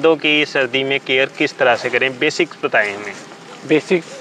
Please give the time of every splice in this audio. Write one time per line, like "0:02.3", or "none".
none